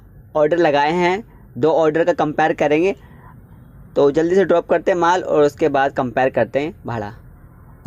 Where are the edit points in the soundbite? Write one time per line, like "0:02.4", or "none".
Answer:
none